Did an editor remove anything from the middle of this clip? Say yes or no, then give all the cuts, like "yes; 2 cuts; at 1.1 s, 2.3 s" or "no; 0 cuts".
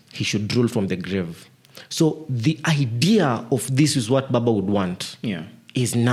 no; 0 cuts